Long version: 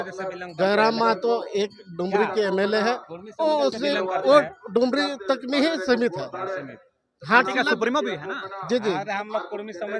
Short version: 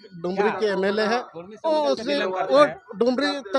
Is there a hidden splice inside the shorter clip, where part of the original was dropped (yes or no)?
no